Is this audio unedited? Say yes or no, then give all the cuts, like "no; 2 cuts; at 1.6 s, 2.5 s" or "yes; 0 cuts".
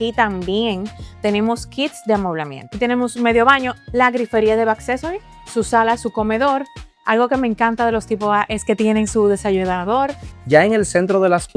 yes; 0 cuts